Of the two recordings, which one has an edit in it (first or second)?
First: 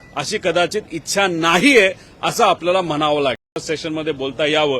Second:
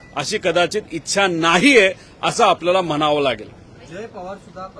first